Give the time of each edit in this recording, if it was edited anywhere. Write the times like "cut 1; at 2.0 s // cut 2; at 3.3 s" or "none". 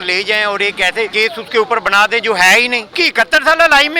cut 1; at 1.1 s // cut 2; at 2.9 s